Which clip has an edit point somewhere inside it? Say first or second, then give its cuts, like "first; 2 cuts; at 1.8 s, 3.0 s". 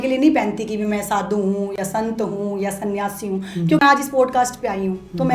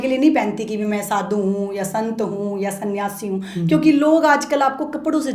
first; 1 cut; at 3.8 s